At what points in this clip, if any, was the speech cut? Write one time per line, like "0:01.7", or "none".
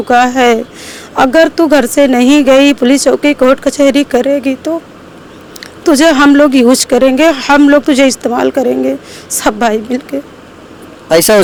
none